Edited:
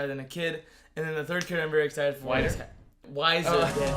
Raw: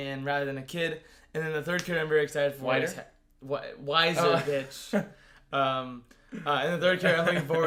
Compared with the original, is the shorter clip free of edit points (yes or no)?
no